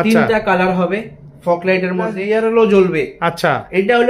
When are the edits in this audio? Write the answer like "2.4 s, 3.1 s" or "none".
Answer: 2.2 s